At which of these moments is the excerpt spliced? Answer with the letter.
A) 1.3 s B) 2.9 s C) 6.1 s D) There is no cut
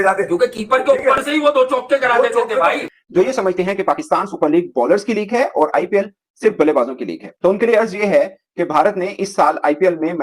B